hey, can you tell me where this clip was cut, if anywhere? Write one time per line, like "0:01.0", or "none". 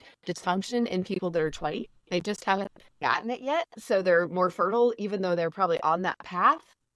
0:03.0